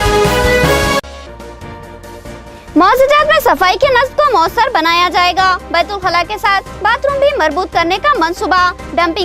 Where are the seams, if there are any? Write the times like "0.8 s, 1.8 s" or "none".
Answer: 1.1 s